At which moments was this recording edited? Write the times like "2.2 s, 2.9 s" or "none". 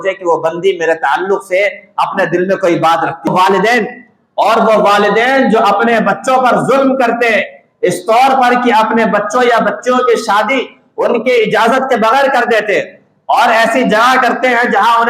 3.3 s